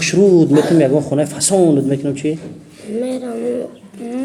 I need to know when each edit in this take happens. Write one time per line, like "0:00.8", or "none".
none